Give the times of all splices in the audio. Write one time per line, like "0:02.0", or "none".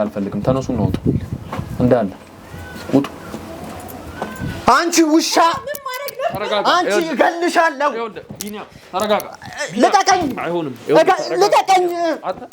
0:04.6